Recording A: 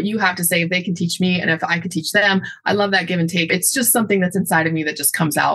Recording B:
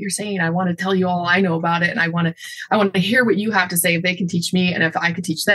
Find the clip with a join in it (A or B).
A